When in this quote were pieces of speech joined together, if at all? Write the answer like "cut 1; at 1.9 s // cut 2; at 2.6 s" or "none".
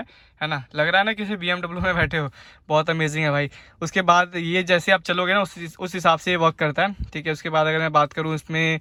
none